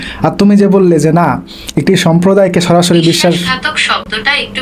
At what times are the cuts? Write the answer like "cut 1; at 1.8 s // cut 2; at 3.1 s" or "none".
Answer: none